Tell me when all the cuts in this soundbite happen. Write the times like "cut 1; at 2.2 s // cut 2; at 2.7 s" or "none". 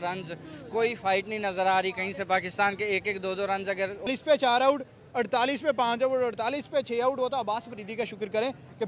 cut 1; at 4.1 s